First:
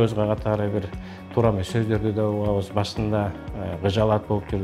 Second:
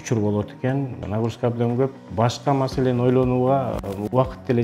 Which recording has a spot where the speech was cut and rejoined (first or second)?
second